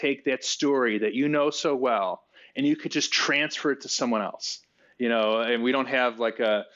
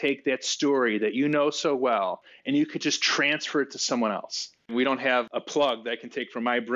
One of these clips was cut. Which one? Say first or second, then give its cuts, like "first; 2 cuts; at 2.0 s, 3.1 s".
second; 2 cuts; at 2.3 s, 4.9 s